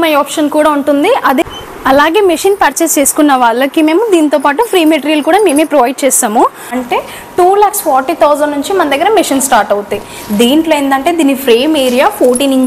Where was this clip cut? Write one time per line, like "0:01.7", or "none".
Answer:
0:01.5
0:06.7

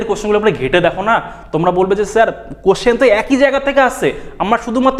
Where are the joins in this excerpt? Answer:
none

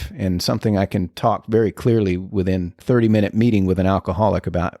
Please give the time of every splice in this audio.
0:02.8

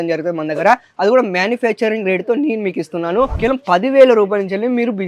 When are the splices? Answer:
0:03.3

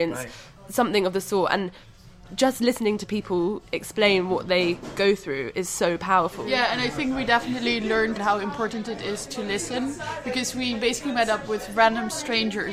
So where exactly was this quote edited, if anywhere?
0:06.4
0:08.2

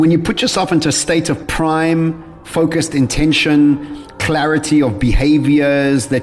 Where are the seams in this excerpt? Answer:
0:01.5

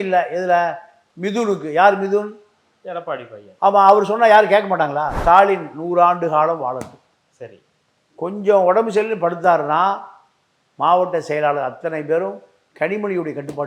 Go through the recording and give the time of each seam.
0:05.1

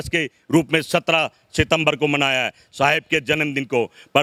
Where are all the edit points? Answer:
none

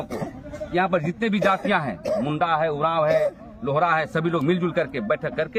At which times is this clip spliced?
none

